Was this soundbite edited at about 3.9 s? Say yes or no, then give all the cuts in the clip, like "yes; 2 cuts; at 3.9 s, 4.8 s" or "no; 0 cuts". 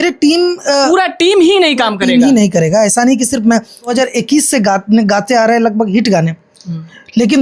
yes; 1 cut; at 3.9 s